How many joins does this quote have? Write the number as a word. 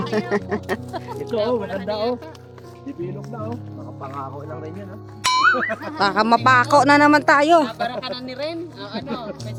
zero